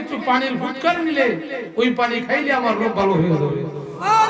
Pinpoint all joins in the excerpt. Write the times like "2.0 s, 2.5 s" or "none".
none